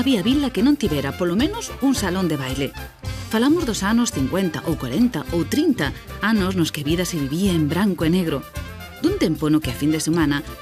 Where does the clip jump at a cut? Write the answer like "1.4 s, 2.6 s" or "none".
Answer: none